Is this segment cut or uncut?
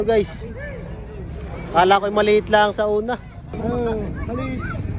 cut